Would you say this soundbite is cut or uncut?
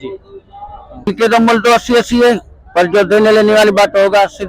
cut